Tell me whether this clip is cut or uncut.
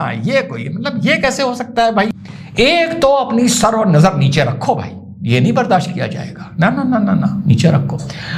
cut